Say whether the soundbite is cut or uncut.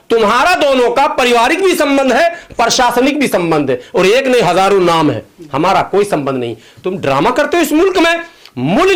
uncut